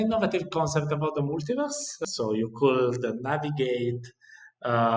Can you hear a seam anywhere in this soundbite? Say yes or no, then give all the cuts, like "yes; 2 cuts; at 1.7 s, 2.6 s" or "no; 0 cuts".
yes; 1 cut; at 2.0 s